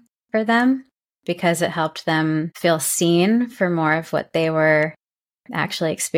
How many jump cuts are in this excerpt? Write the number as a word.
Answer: one